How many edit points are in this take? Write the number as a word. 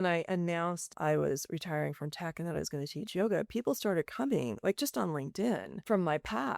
two